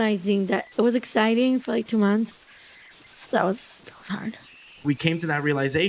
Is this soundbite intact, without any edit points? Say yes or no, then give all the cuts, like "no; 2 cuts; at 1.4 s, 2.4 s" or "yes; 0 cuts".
no; 1 cut; at 4.7 s